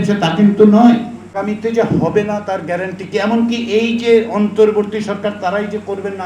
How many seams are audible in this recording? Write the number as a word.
one